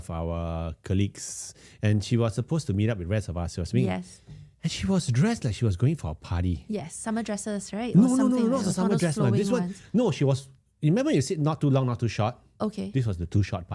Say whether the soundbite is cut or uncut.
uncut